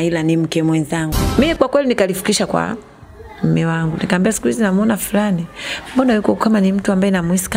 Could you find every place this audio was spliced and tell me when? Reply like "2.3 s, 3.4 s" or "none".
1.2 s